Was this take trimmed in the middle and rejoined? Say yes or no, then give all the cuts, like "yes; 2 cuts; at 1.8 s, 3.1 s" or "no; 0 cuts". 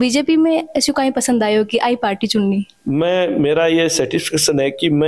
yes; 1 cut; at 2.7 s